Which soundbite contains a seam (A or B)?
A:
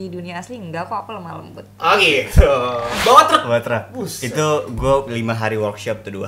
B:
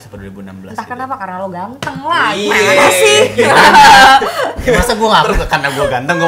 A